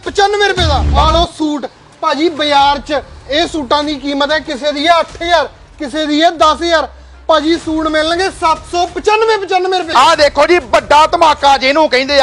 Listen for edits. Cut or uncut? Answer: cut